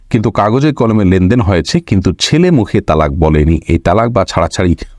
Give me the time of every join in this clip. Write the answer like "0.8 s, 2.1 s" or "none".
none